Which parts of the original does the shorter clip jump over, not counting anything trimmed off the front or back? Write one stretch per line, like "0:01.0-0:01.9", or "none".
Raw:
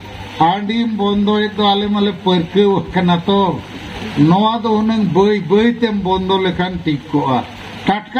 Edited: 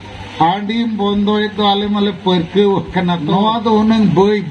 0:03.3-0:04.3